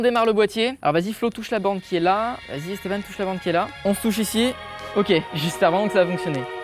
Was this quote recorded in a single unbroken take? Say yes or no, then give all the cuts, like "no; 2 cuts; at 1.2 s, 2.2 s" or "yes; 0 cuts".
no; 4 cuts; at 0.8 s, 2.5 s, 3.7 s, 5.3 s